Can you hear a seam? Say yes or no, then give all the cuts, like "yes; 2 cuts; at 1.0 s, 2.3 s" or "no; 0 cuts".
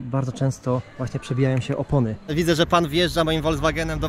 yes; 2 cuts; at 0.9 s, 2.3 s